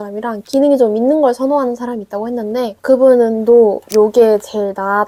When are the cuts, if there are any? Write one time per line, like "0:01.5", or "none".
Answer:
none